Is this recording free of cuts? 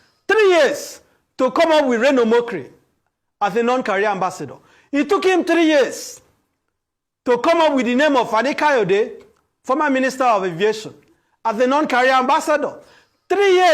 yes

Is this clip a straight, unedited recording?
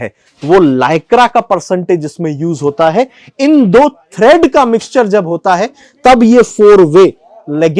yes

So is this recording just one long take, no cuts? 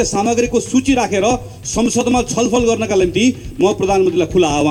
yes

